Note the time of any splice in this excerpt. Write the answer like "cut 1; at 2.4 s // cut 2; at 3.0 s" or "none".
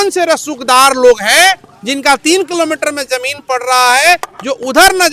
none

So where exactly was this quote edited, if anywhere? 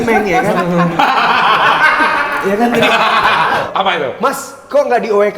cut 1; at 0.9 s // cut 2; at 3.6 s

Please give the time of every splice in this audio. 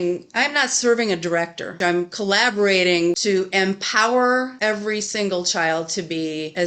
cut 1; at 1.7 s // cut 2; at 3.1 s // cut 3; at 4.5 s

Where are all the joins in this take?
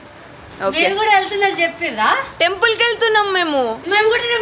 none

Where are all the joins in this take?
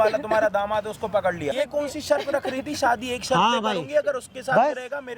cut 1; at 1.5 s

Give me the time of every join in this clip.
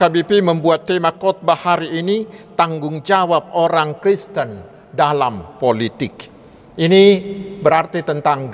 none

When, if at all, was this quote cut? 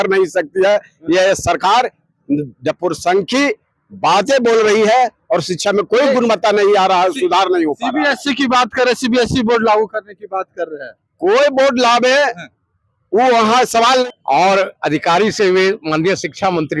cut 1; at 14.0 s

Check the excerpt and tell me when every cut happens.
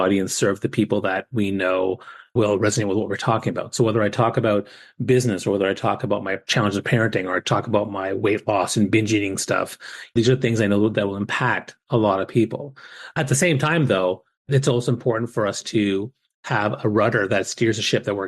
cut 1; at 2.3 s // cut 2; at 6.4 s // cut 3; at 10.1 s // cut 4; at 13.1 s // cut 5; at 14.5 s

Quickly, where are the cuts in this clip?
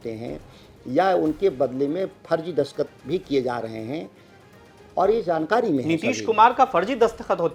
none

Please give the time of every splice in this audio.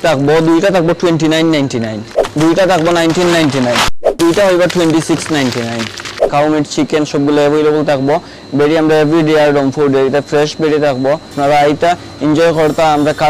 cut 1; at 2.1 s // cut 2; at 4.2 s // cut 3; at 6.3 s // cut 4; at 11.3 s

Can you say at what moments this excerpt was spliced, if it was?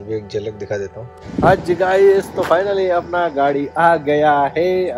cut 1; at 1.1 s

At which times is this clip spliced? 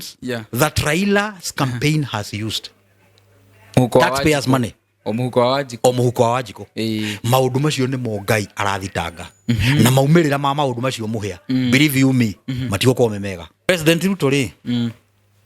cut 1; at 13.7 s

